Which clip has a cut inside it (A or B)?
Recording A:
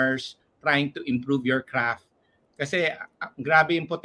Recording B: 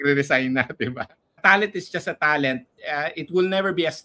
B